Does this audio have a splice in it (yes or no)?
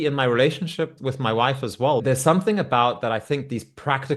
yes